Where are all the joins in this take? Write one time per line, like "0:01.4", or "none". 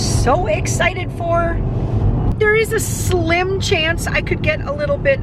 0:02.3

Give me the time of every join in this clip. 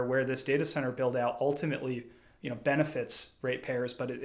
none

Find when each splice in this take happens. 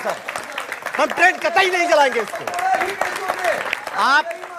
0:02.9

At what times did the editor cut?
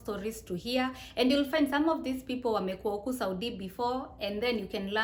none

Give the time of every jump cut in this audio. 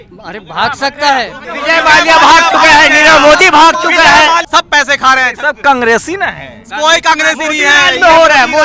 0:01.5
0:04.4

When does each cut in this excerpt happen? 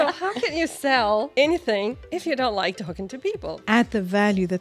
0:03.5

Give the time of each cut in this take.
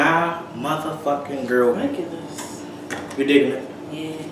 none

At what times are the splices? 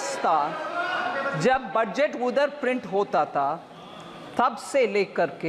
none

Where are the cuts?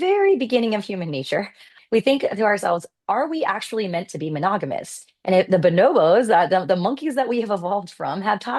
0:01.7

